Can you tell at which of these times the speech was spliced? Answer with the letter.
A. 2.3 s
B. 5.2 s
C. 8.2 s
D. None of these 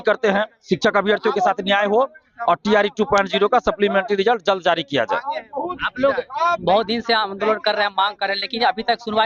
D